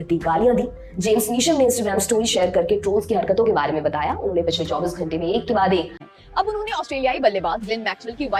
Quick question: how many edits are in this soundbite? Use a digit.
1